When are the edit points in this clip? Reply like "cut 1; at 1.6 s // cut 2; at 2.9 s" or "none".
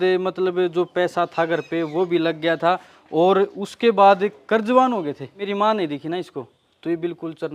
cut 1; at 5.4 s